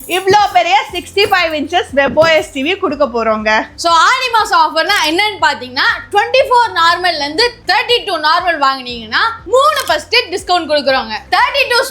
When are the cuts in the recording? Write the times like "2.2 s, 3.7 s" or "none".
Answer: 3.7 s